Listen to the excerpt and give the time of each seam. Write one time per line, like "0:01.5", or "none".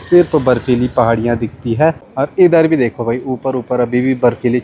0:02.1